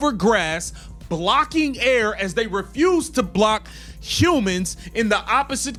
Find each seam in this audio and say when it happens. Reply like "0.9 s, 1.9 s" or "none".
none